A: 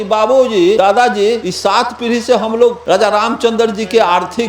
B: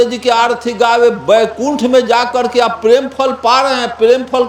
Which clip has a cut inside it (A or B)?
A